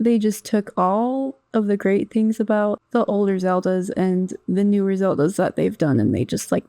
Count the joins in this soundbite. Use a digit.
1